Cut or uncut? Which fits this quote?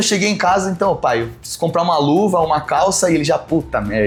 uncut